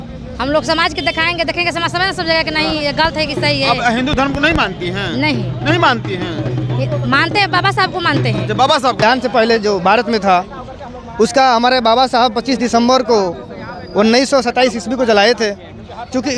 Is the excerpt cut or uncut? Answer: cut